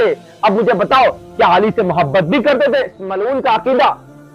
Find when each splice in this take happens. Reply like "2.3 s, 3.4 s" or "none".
3.0 s